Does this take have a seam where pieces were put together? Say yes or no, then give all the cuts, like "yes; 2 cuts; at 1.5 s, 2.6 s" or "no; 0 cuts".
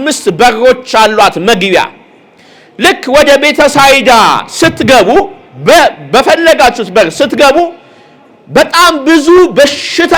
no; 0 cuts